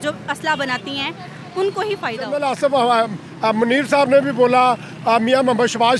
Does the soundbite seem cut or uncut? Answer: cut